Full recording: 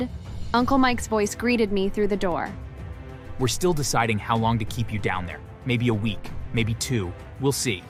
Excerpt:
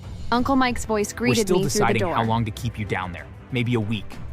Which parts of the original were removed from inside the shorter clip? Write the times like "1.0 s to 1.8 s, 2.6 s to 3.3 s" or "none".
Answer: 2.4 s to 4.3 s